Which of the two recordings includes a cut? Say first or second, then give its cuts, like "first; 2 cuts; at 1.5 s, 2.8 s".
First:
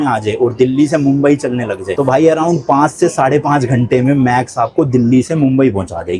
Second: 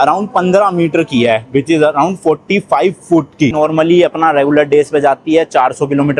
second; 1 cut; at 3.5 s